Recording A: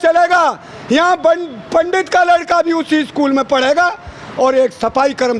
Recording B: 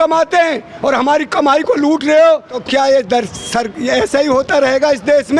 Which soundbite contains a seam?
B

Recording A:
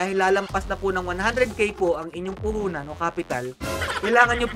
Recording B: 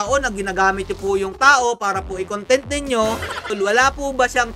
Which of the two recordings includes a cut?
B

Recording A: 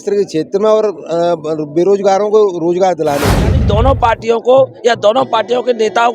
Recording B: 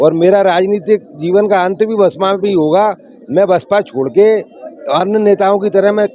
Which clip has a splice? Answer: A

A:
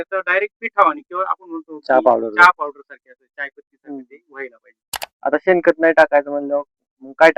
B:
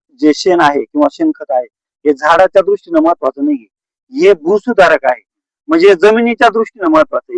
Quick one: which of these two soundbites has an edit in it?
A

